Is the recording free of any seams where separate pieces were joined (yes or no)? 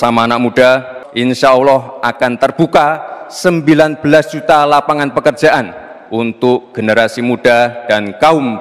yes